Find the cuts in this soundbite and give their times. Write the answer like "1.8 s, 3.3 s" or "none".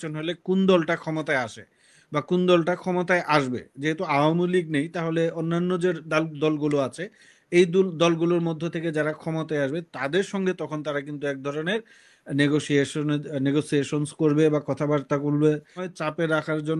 15.8 s

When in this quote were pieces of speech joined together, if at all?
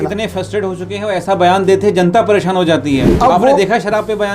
3.1 s

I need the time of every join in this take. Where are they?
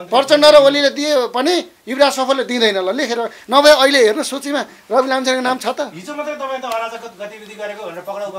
none

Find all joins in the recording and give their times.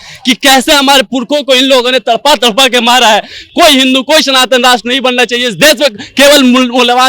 3.4 s

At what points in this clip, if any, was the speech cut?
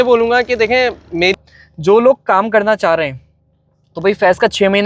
1.4 s

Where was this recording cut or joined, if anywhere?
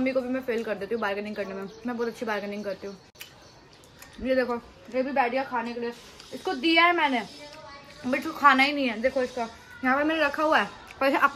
none

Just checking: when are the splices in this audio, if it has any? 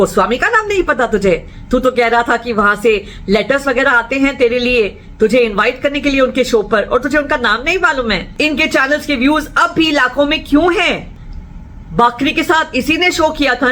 8.3 s, 11.1 s

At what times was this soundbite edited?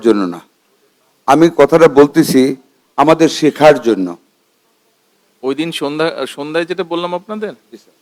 none

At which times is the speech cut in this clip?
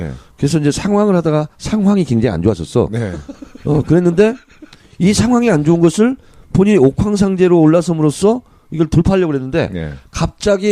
1.1 s

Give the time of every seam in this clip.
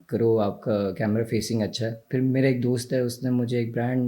2.0 s

